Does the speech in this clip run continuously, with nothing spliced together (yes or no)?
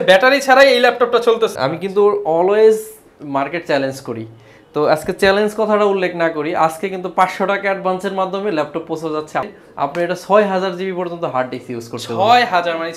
no